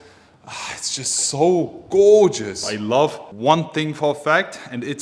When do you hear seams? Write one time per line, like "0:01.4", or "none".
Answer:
0:02.8